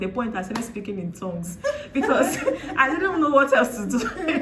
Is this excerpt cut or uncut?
uncut